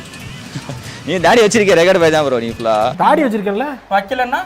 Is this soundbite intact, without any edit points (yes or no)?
no